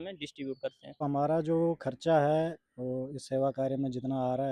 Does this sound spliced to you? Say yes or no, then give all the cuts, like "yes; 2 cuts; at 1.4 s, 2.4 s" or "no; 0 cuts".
yes; 1 cut; at 1.0 s